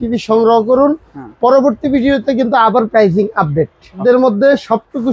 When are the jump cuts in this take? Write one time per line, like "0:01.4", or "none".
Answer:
0:04.0